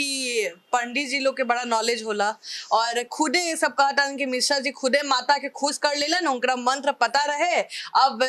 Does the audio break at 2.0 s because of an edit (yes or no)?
no